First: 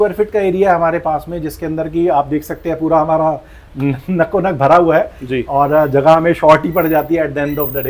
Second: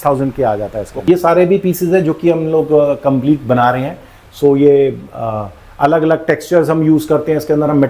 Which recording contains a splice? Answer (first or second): second